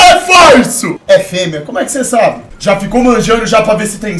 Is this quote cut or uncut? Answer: cut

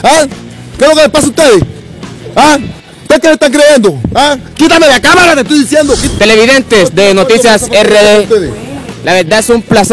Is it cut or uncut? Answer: cut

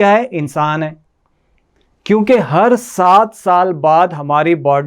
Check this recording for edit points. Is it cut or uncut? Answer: uncut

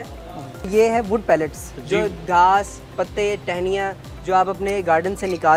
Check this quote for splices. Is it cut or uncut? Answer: uncut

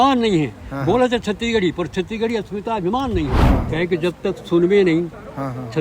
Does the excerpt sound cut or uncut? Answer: cut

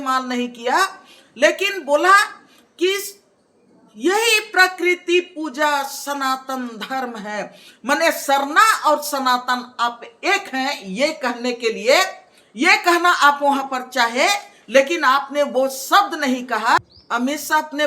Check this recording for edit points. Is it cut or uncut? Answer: cut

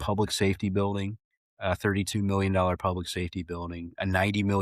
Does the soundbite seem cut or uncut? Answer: uncut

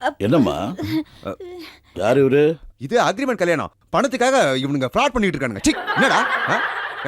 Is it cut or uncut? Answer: cut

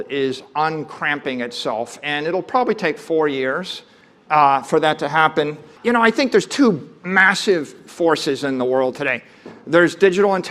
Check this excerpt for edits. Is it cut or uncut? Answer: cut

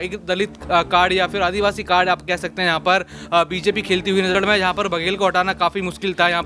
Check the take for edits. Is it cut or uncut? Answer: cut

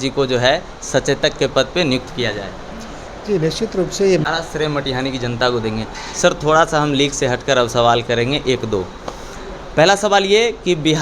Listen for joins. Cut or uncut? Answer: cut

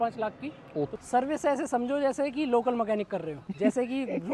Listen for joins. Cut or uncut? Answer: cut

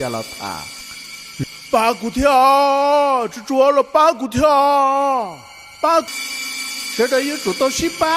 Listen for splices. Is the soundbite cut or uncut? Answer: cut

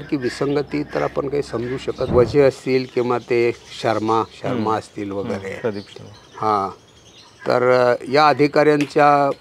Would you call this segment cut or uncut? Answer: cut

